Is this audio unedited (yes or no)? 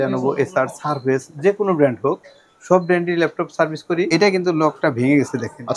no